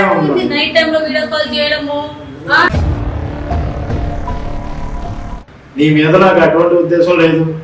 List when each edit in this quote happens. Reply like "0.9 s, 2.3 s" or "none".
5.3 s